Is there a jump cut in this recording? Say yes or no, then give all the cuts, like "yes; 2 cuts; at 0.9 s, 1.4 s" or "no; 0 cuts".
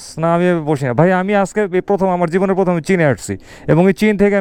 no; 0 cuts